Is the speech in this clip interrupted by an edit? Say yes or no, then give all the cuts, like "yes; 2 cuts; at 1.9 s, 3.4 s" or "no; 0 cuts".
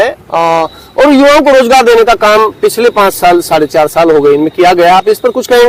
no; 0 cuts